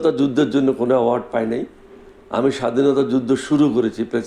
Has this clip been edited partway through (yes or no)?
no